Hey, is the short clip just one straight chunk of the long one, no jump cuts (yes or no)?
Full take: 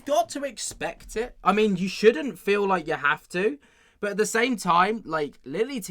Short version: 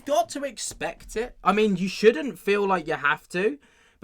yes